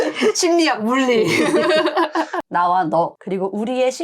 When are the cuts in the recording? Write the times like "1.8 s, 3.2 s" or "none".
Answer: 2.4 s